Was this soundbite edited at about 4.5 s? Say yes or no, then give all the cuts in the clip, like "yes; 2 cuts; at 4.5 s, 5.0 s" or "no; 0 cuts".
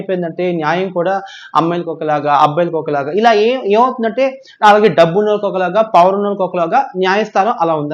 no; 0 cuts